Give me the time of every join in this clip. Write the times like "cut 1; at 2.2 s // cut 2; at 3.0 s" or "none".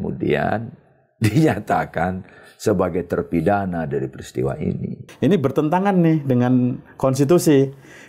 cut 1; at 5.0 s

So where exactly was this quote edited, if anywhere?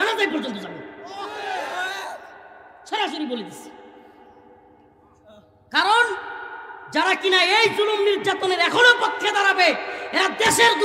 none

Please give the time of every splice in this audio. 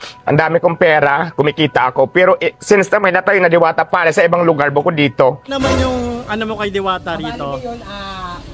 cut 1; at 5.5 s

